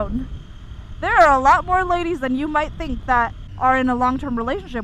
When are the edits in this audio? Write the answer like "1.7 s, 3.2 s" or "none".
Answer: 3.4 s

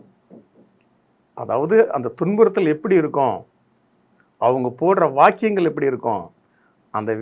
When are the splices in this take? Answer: none

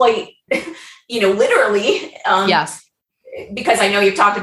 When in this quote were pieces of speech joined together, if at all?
none

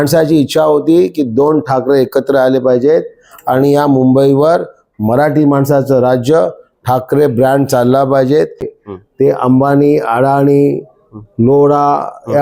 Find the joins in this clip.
8.7 s

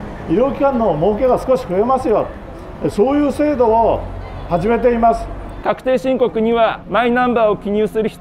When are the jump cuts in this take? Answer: 5.6 s, 6.8 s

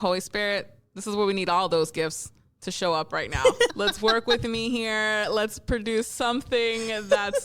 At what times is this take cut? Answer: none

